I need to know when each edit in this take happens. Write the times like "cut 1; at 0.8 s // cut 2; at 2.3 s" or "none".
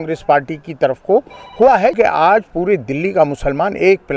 cut 1; at 1.9 s